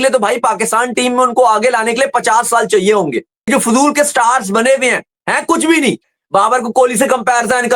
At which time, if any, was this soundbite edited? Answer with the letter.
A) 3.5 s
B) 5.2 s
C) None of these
A